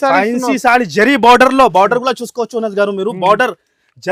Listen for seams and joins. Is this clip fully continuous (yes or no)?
yes